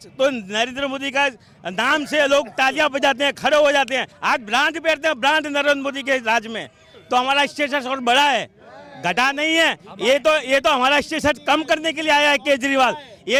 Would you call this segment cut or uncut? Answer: uncut